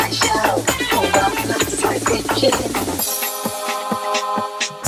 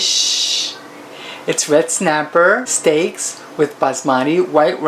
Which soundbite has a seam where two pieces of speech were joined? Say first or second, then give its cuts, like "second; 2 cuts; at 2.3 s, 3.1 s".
second; 1 cut; at 2.7 s